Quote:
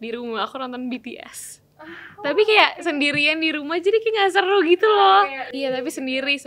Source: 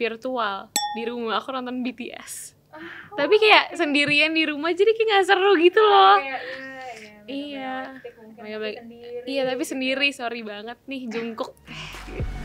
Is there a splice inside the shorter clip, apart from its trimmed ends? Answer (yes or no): yes